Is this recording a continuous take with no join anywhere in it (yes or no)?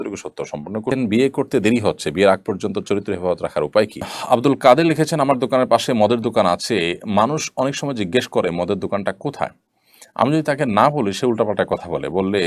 no